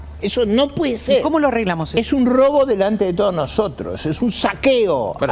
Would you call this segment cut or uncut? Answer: uncut